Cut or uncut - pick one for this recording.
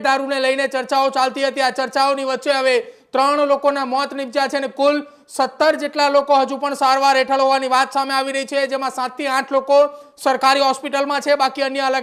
uncut